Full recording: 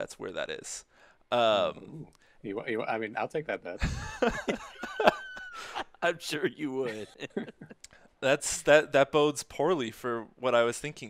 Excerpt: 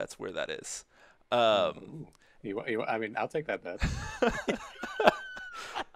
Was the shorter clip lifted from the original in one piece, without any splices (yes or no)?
yes